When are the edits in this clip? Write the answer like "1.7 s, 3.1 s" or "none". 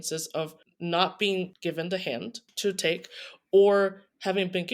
2.5 s